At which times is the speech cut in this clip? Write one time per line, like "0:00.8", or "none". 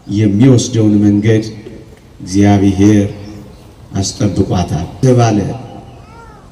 0:05.0